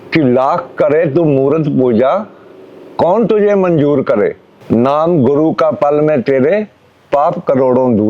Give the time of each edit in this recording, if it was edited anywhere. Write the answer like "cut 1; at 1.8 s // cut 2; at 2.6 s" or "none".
cut 1; at 4.5 s